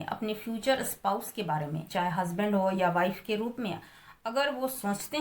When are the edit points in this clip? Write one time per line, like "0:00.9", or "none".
0:01.9